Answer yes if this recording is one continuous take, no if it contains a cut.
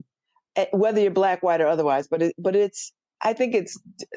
no